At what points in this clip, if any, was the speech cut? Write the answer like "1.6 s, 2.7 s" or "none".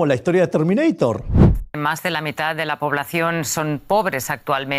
1.4 s